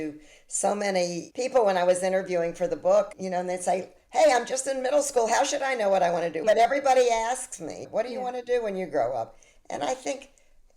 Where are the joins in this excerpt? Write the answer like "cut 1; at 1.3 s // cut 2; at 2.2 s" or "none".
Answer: cut 1; at 6.4 s